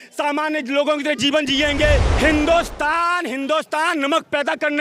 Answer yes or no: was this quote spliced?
yes